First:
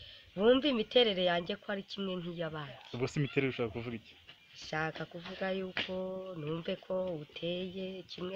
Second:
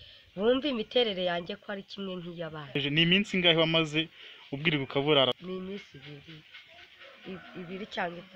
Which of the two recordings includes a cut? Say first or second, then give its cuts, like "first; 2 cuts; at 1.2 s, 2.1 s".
second; 2 cuts; at 2.8 s, 5.4 s